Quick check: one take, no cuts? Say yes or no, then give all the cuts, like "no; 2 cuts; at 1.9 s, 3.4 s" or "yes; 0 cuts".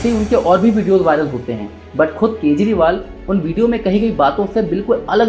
yes; 0 cuts